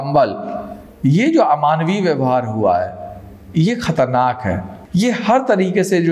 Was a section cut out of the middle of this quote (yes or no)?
yes